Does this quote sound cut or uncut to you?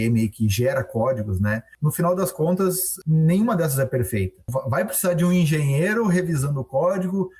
cut